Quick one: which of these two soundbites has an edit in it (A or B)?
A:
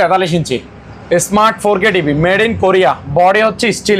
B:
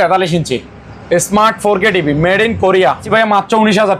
B